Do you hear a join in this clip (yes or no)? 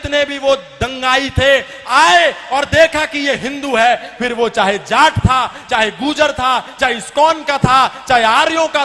no